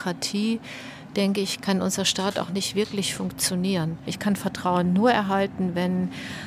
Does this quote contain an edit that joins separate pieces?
yes; 1 cut; at 4.1 s

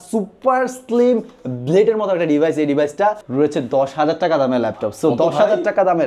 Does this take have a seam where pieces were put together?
yes; 1 cut; at 3.2 s

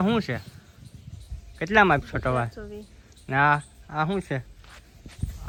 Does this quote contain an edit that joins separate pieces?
no; 0 cuts

